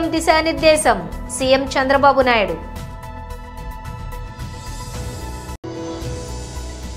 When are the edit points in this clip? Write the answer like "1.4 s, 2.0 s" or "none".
none